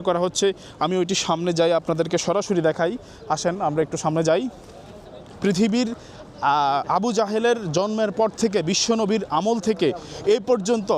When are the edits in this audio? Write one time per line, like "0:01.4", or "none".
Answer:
none